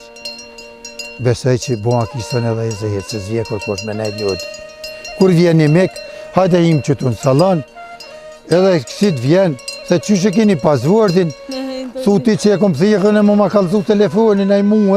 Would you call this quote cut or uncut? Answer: uncut